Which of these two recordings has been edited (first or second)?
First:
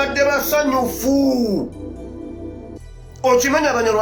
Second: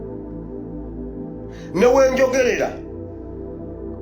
second